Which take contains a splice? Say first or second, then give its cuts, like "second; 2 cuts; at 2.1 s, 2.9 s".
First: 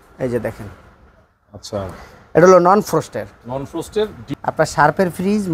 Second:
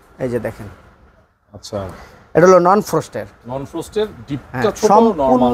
first; 1 cut; at 4.3 s